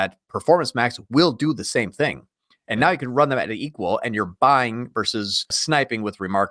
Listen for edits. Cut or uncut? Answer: cut